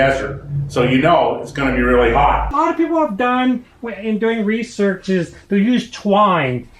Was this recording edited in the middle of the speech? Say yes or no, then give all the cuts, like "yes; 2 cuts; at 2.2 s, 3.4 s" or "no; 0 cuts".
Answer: yes; 1 cut; at 2.5 s